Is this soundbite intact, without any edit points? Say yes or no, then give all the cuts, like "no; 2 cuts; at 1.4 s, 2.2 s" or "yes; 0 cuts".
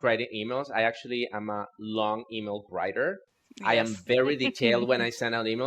yes; 0 cuts